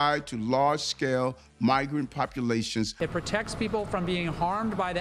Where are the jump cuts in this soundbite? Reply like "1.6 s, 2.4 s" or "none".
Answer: 2.9 s